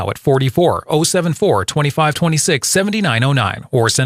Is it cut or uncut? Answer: uncut